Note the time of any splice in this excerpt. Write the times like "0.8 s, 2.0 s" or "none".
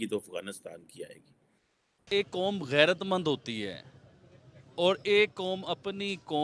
2.1 s

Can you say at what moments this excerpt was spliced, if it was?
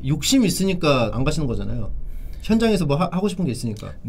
none

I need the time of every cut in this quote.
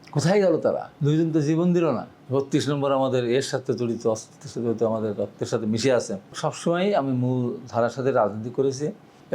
0.9 s, 2.1 s, 6.4 s

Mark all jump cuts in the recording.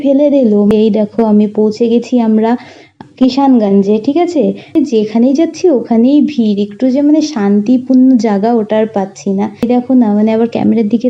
0.7 s, 4.7 s, 9.7 s

